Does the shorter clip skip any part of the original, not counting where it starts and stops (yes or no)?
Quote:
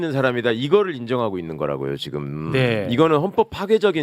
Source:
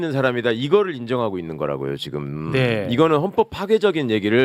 no